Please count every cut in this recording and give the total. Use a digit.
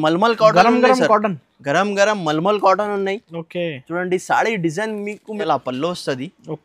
1